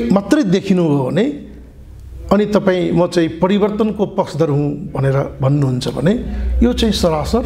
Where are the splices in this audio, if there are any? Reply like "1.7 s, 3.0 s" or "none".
none